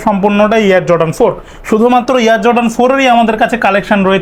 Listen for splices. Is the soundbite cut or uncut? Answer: uncut